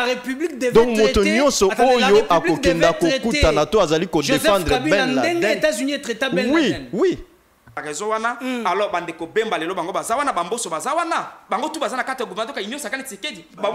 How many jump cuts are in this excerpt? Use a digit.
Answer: 1